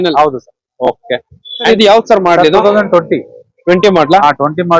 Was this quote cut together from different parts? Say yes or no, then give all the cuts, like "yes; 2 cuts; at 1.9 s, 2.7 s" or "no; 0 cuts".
yes; 1 cut; at 1.7 s